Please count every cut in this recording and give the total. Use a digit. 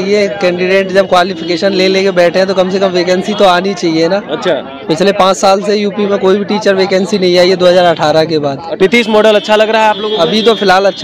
1